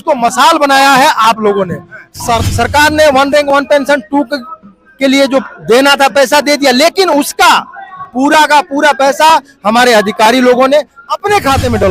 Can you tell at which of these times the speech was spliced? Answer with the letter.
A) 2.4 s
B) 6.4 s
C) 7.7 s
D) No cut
A